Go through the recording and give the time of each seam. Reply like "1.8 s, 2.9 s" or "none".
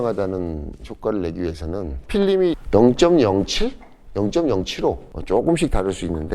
5.1 s